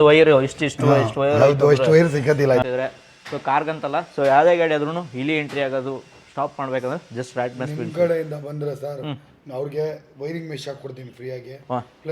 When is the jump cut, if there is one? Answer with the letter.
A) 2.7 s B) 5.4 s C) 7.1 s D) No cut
A